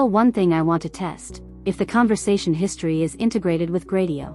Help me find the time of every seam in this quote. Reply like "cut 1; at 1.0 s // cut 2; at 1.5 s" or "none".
none

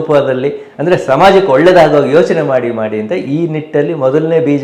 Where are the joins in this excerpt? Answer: none

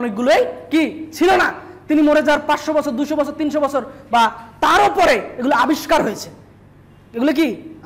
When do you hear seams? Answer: none

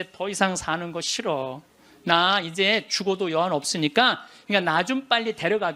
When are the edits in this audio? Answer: cut 1; at 4.3 s

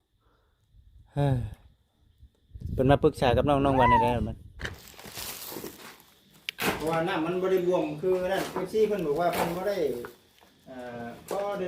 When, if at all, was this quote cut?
cut 1; at 4.7 s

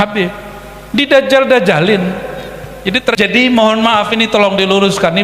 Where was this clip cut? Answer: cut 1; at 3.1 s

